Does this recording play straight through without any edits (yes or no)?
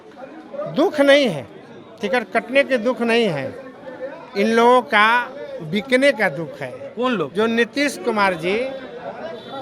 yes